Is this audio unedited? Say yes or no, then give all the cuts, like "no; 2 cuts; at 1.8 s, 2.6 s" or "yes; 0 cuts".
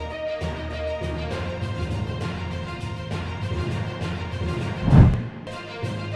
yes; 0 cuts